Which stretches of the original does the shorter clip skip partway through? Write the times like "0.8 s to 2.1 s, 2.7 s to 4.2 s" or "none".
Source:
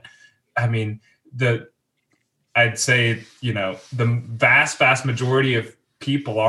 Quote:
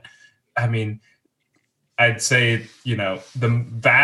1.2 s to 1.8 s